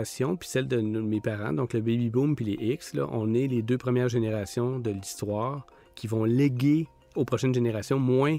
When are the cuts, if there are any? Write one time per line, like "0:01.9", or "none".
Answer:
0:07.0